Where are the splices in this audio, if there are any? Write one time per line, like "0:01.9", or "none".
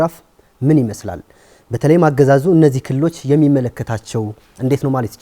none